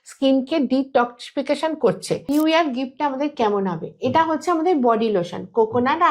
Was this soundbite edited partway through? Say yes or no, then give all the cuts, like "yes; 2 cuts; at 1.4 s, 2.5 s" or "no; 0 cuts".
yes; 1 cut; at 2.2 s